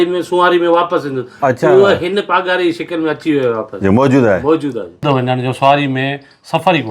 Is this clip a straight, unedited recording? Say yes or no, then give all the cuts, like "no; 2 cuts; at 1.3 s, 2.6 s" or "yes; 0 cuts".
no; 1 cut; at 5.0 s